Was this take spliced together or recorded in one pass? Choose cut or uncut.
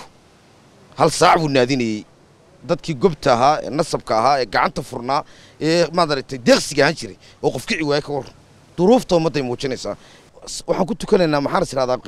cut